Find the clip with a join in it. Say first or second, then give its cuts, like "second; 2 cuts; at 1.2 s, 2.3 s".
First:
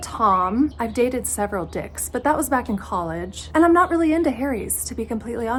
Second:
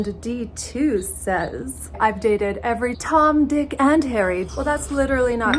second; 3 cuts; at 1.9 s, 3.0 s, 4.4 s